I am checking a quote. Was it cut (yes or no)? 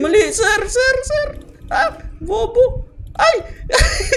no